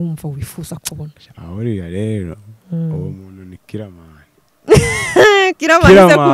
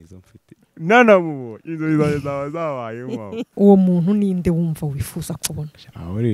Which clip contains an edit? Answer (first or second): second